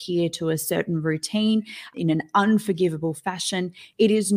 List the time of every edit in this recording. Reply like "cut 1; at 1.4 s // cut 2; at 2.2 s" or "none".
cut 1; at 1.9 s